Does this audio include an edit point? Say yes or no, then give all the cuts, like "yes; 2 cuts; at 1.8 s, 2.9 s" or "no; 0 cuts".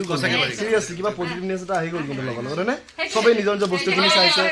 no; 0 cuts